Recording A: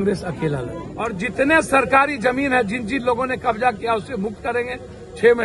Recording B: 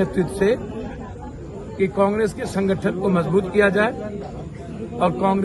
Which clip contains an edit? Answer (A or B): A